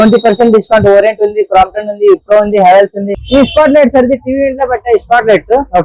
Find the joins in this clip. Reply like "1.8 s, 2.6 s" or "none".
3.2 s